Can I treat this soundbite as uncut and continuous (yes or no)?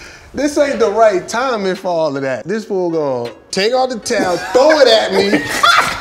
no